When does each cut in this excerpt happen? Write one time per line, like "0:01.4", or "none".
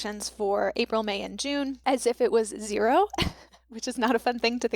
0:01.8

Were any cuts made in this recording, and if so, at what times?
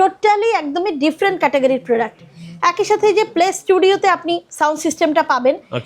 none

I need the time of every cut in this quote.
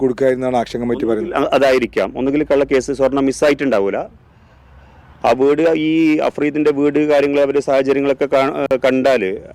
none

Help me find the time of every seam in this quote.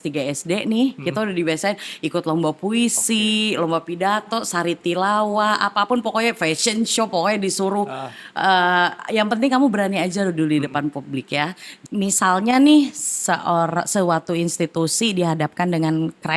0:11.7

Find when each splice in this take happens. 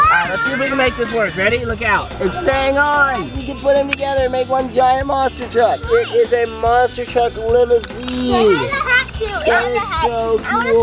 0:02.1
0:03.4
0:05.8

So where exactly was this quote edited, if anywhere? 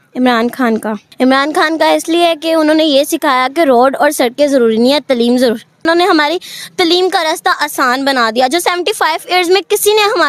0:01.0
0:05.8

